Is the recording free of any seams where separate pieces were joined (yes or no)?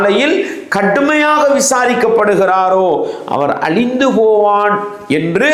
yes